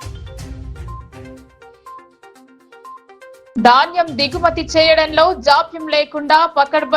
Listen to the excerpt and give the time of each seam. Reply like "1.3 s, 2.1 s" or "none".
3.4 s